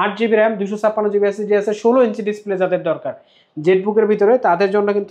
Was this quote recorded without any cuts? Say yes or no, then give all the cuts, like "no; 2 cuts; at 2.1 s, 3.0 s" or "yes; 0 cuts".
yes; 0 cuts